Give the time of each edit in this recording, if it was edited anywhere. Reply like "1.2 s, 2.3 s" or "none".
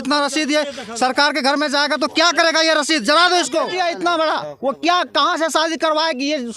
3.7 s